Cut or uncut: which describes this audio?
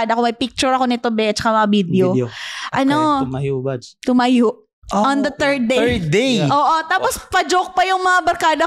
uncut